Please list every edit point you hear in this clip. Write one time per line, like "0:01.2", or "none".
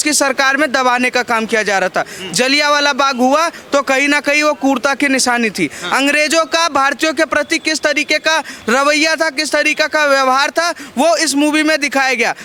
none